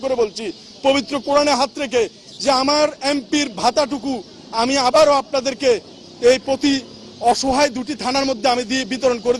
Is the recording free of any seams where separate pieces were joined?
yes; 0 cuts

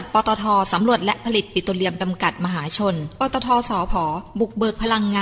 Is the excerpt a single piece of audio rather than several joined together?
yes; 0 cuts

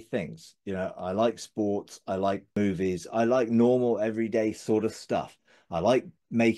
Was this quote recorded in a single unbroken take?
no; 1 cut; at 2.5 s

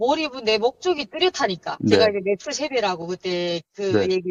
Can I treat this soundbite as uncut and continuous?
yes; 0 cuts

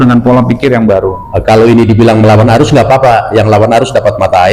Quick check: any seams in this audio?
yes; 1 cut; at 1.3 s

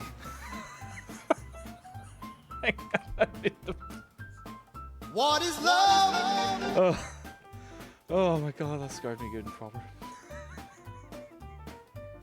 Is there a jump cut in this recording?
yes; 1 cut; at 9.7 s

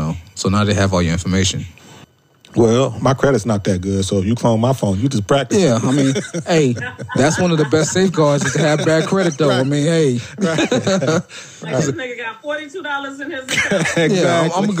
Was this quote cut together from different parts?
yes; 1 cut; at 2.0 s

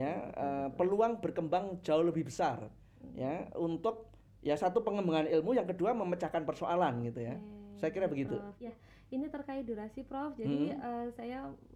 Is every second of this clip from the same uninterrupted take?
yes; 0 cuts

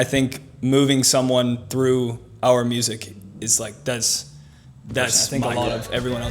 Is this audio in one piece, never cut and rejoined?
no; 1 cut; at 5.2 s

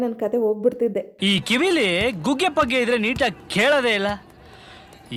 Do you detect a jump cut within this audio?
no; 0 cuts

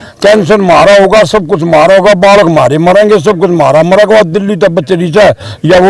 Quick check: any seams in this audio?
no; 0 cuts

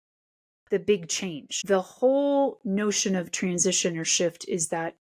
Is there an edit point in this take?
yes; 1 cut; at 1.5 s

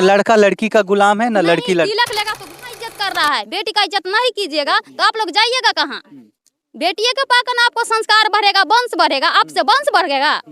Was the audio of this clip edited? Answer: yes; 1 cut; at 2.5 s

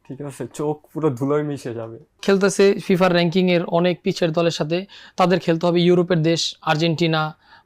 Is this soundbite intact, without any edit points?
no; 1 cut; at 2.2 s

